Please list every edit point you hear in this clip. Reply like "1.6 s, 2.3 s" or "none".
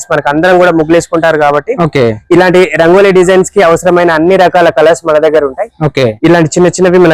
6.1 s